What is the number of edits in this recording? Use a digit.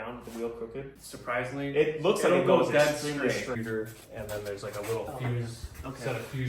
2